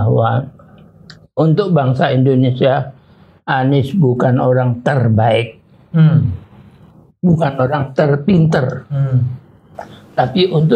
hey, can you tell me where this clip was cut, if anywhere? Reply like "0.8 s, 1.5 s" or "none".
none